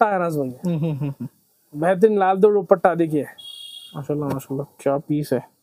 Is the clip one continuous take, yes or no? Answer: no